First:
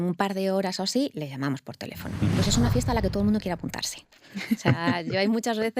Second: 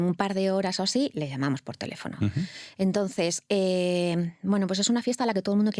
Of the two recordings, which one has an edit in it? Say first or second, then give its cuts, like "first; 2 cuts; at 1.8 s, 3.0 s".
first; 1 cut; at 2.3 s